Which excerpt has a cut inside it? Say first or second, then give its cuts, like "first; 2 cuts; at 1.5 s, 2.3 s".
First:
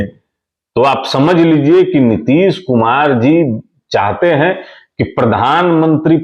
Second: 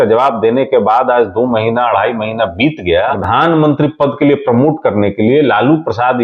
second; 1 cut; at 3.2 s